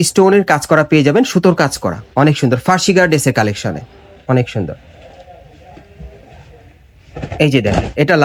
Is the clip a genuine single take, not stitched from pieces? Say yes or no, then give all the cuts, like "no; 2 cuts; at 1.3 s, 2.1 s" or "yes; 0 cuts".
yes; 0 cuts